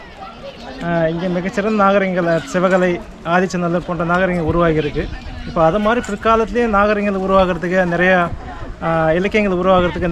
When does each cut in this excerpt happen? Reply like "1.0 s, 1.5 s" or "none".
none